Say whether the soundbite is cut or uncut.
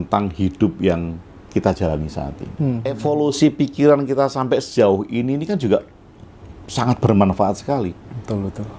cut